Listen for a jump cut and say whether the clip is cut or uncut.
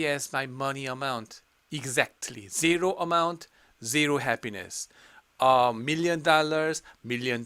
uncut